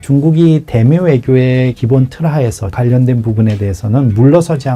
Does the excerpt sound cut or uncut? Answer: cut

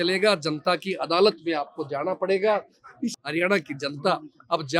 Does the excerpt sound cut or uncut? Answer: cut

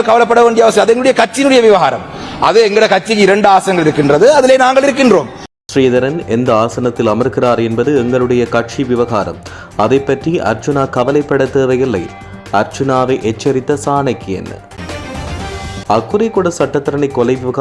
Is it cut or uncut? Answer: cut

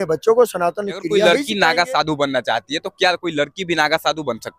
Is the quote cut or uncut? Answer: cut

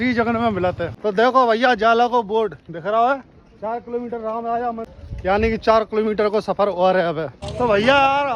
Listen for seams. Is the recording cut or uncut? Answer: cut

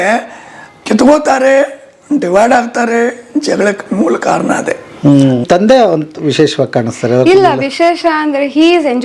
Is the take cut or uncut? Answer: cut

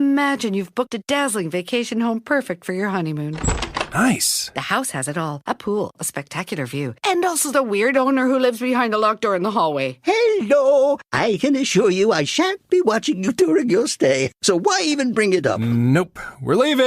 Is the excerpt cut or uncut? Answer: uncut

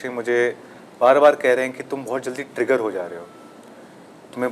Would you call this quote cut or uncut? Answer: uncut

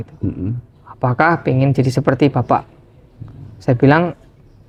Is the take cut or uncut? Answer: uncut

